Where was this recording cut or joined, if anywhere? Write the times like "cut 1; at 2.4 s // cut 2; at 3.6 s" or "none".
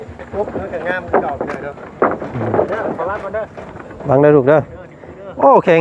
none